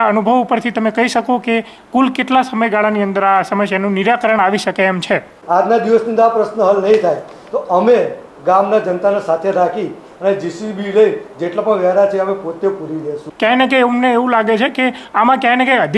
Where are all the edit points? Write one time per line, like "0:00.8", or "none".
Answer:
0:05.3
0:13.3